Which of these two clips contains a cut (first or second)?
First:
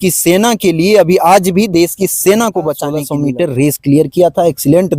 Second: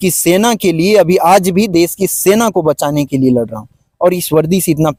first